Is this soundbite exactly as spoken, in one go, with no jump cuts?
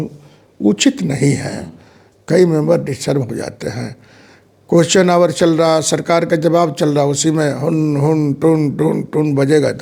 yes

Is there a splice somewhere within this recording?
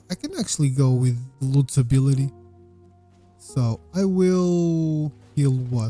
yes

